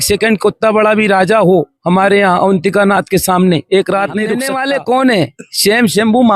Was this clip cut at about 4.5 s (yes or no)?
yes